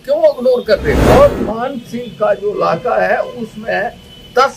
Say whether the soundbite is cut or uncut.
cut